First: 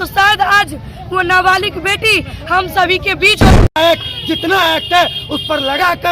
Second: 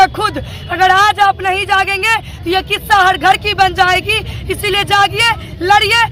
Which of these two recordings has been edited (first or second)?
first